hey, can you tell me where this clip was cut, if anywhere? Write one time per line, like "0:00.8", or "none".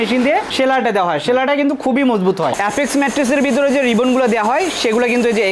0:02.5